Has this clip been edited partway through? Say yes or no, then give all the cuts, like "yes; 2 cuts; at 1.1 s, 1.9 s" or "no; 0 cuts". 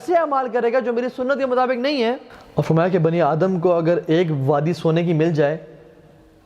yes; 1 cut; at 2.3 s